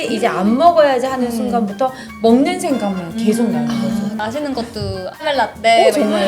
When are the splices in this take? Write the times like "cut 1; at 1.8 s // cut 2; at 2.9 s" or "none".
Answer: cut 1; at 4.2 s // cut 2; at 5.2 s

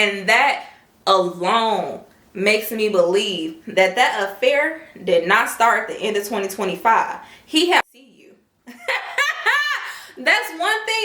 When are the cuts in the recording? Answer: cut 1; at 7.8 s

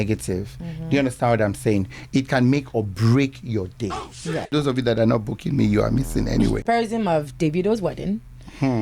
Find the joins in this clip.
cut 1; at 4.4 s // cut 2; at 6.6 s

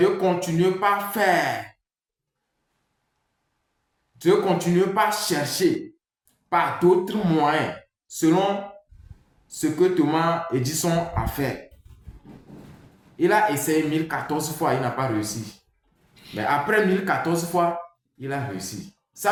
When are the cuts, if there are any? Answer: none

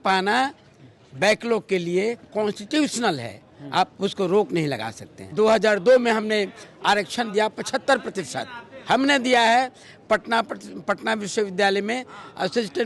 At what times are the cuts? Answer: cut 1; at 5.3 s

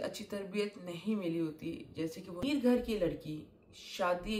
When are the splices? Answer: cut 1; at 2.4 s

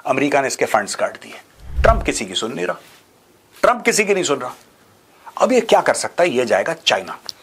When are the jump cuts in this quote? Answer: cut 1; at 1.6 s

